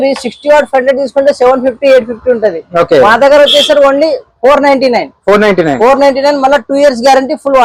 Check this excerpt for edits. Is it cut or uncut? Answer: uncut